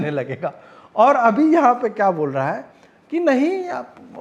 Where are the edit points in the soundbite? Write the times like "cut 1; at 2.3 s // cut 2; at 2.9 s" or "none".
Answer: none

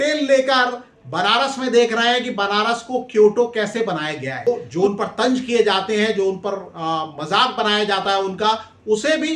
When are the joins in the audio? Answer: cut 1; at 4.5 s

